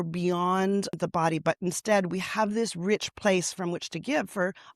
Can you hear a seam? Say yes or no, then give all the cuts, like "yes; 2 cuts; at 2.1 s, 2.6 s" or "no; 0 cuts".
yes; 1 cut; at 1.0 s